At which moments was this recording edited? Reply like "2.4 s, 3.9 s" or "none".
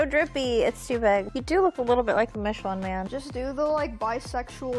1.3 s, 3.1 s